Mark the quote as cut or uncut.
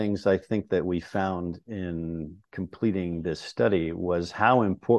uncut